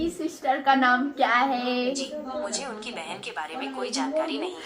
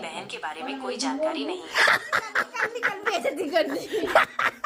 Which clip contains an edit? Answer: first; 1 cut; at 2.0 s

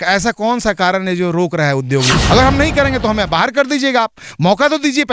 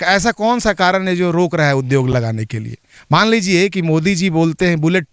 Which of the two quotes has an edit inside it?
first; 1 cut; at 2.1 s

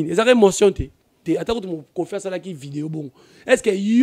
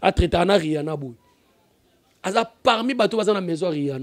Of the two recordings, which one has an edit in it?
first; 1 cut; at 1.2 s

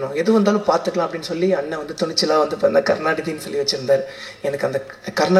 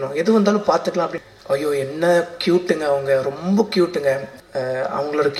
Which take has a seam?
second; 2 cuts; at 1.2 s, 4.3 s

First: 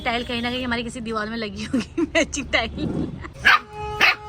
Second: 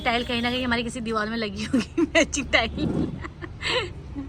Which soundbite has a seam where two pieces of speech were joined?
first; 1 cut; at 3.3 s

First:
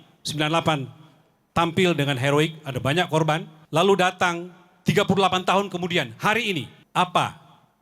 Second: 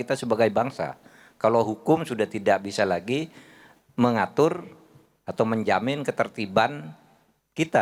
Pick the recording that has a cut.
first; 2 cuts; at 3.5 s, 6.8 s

